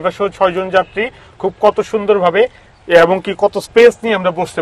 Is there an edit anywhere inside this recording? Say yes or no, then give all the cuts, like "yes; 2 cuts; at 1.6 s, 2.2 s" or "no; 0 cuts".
no; 0 cuts